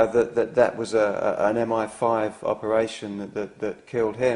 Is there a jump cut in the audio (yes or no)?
no